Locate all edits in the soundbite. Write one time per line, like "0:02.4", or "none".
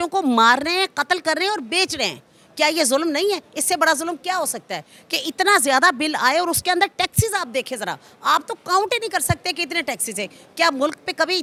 none